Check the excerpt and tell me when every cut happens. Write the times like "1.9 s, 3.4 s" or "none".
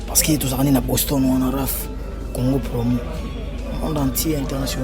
none